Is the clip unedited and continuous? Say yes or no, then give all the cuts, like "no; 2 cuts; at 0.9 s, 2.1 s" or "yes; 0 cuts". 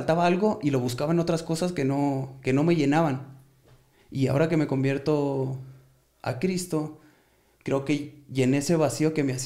yes; 0 cuts